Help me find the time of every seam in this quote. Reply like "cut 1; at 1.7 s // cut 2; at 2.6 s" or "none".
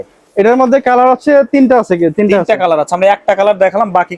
none